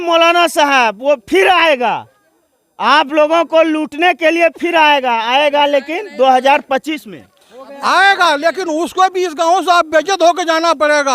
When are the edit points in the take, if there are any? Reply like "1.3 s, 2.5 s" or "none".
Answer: none